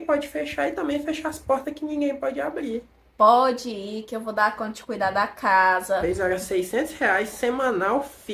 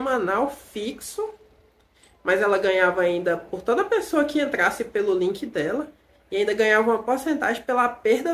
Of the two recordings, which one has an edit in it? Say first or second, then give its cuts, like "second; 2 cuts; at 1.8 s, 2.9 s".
first; 2 cuts; at 3.0 s, 6.1 s